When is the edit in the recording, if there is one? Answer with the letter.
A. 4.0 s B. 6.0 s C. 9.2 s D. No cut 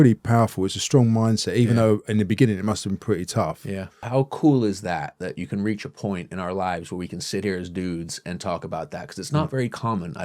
A